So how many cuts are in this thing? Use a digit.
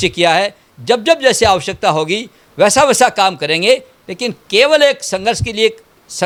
0